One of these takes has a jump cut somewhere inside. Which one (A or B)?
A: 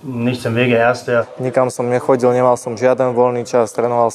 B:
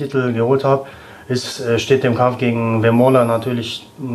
A